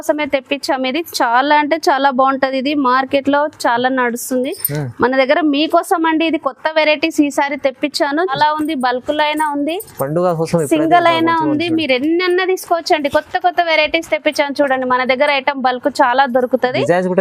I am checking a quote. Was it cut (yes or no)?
yes